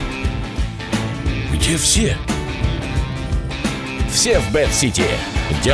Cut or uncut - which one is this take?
uncut